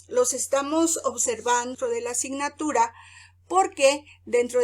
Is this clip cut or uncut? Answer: cut